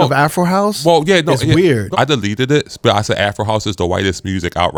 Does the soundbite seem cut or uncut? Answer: uncut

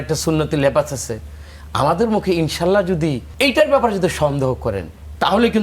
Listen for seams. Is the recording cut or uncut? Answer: cut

